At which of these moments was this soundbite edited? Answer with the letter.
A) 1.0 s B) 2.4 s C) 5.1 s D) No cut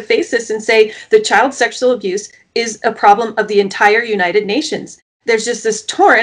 C